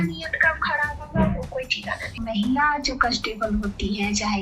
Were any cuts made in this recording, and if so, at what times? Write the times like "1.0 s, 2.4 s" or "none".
2.2 s